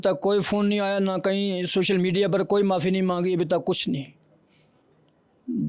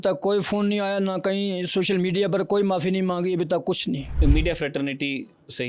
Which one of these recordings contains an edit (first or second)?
second